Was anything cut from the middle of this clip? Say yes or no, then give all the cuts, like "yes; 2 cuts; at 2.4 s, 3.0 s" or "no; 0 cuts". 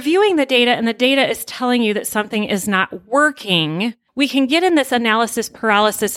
yes; 1 cut; at 4.0 s